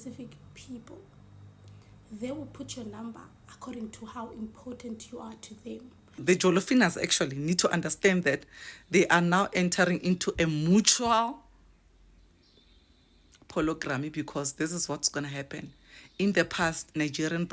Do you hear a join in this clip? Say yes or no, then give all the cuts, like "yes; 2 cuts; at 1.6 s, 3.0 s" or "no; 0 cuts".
yes; 1 cut; at 6.2 s